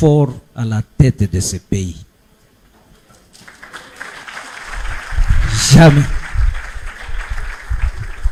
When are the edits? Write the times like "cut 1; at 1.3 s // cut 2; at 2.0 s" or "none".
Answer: none